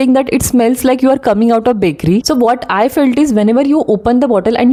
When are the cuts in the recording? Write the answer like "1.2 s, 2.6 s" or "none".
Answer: none